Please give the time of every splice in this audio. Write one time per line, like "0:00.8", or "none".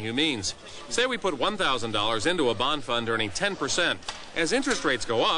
0:01.9